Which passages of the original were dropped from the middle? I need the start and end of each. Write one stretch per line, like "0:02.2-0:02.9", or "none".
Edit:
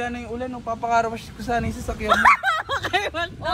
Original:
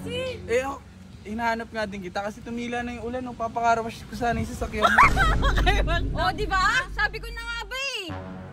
none